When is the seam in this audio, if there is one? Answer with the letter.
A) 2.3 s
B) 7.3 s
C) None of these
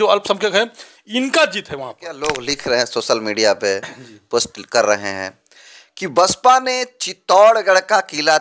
A